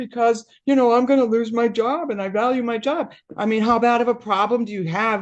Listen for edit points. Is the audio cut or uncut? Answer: cut